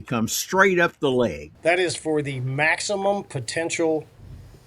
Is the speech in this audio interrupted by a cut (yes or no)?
yes